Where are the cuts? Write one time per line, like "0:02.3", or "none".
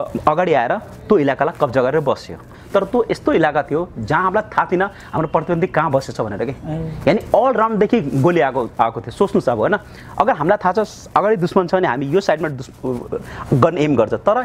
0:02.4